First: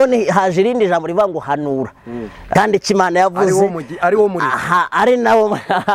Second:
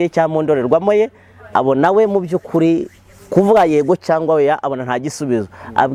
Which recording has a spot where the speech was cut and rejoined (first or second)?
first